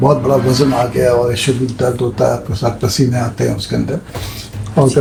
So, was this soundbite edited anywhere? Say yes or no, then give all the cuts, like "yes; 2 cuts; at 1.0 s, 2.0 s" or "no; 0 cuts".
no; 0 cuts